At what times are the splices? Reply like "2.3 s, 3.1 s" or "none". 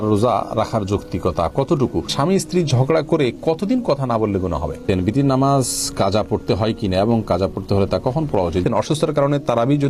2.1 s, 4.8 s, 8.5 s